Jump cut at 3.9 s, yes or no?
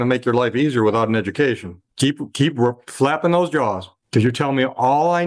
no